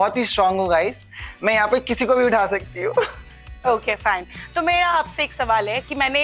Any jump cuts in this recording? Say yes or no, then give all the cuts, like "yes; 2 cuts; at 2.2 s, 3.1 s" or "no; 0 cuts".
no; 0 cuts